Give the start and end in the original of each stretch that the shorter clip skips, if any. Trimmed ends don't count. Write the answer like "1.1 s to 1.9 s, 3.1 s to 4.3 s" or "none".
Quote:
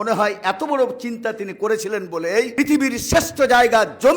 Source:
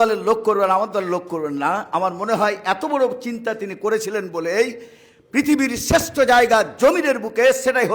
4.7 s to 5.3 s